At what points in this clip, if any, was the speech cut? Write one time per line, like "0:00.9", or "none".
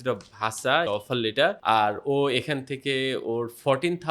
0:01.2